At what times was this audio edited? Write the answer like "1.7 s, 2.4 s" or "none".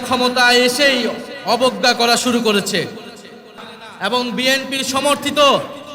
3.7 s